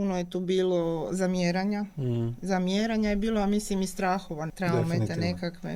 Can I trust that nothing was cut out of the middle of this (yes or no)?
no